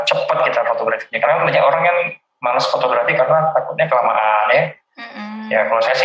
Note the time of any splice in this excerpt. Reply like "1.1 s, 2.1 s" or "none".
none